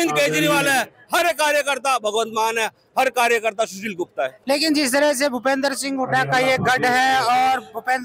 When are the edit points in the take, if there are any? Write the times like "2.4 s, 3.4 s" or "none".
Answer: 4.4 s